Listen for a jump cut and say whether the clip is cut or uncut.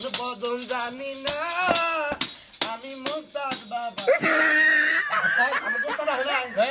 uncut